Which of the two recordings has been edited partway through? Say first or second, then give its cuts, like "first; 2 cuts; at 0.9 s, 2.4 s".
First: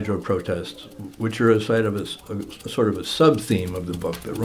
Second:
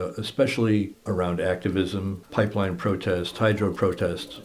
second; 2 cuts; at 1.0 s, 2.2 s